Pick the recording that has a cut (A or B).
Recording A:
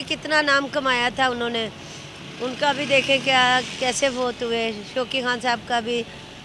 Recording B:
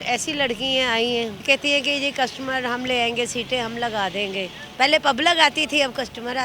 B